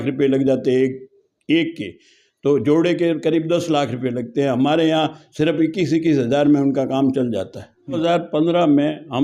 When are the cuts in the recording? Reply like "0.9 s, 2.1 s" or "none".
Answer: 8.0 s